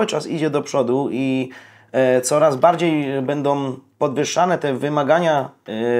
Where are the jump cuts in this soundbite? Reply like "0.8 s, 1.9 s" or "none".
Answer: none